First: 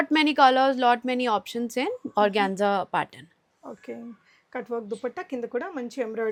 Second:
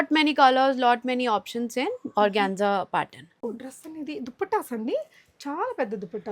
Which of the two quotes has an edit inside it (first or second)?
second